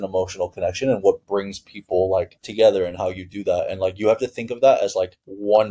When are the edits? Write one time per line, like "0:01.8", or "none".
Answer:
none